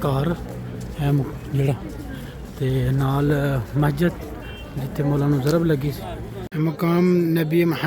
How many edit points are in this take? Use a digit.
1